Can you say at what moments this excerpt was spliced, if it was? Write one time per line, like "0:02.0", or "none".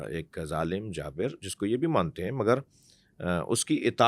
none